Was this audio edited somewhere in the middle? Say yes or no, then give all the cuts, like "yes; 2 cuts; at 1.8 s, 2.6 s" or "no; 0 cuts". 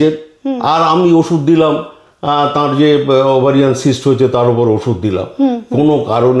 no; 0 cuts